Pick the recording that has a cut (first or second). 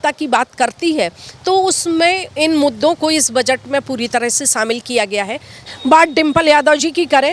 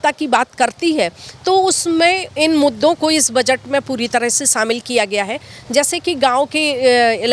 first